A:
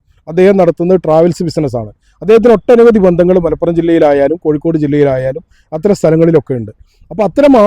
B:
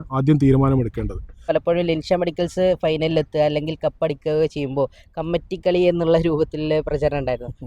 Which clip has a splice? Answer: B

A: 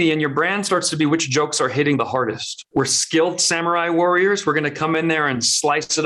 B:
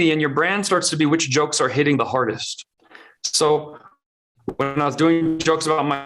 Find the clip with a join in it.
A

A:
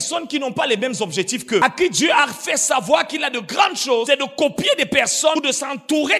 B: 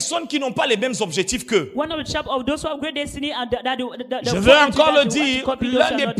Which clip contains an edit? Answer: A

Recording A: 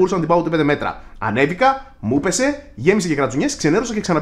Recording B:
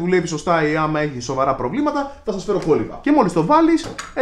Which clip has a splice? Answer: B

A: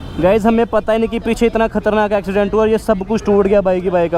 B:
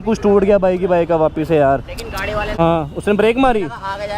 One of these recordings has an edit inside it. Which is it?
B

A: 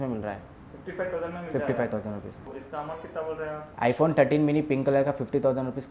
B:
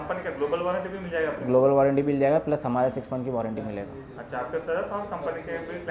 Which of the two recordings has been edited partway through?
A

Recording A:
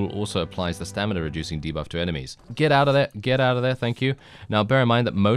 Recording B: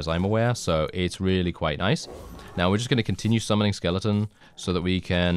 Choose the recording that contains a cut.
A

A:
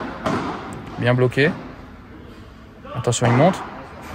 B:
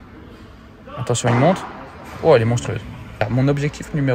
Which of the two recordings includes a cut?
B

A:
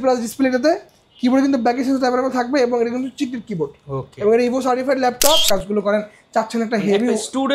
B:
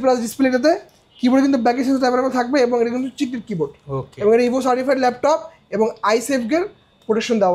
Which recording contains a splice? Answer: A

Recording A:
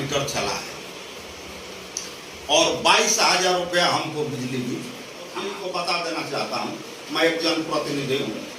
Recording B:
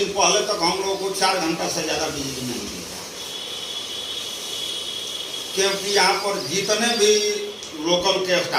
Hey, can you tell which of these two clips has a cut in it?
A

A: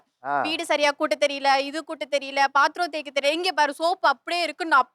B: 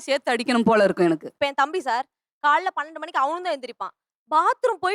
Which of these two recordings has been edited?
B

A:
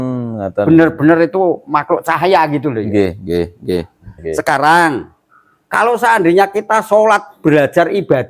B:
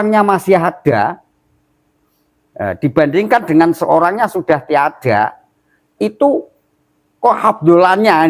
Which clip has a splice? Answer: A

